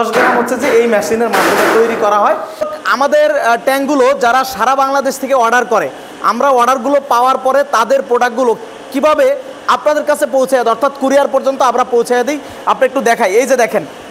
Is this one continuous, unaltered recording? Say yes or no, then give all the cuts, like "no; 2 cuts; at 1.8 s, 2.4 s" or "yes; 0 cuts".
no; 1 cut; at 2.5 s